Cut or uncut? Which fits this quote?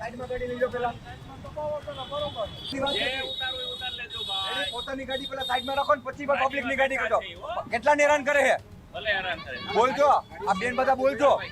uncut